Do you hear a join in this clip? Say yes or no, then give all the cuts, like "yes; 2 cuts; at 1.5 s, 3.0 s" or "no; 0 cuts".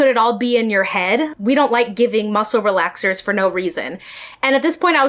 no; 0 cuts